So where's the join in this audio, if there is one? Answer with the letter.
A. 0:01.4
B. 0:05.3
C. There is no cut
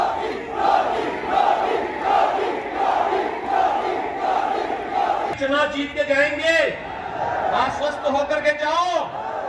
B